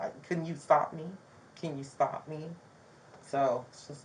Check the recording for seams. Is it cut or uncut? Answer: uncut